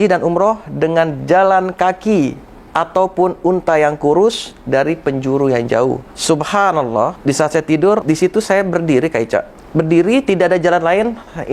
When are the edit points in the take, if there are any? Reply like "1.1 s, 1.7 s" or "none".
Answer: 6.1 s, 7.2 s, 8.0 s, 9.6 s